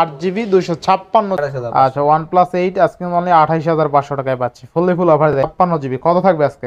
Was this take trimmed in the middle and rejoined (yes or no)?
yes